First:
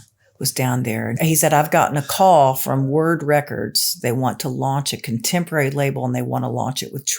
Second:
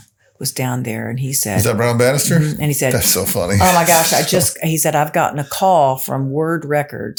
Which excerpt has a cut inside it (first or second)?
first